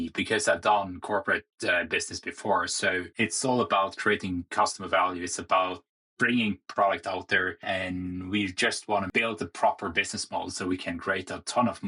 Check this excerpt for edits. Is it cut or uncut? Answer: cut